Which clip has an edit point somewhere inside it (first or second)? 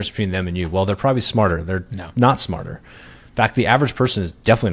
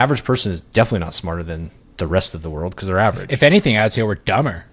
second